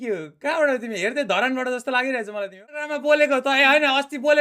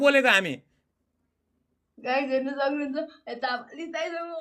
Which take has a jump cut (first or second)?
first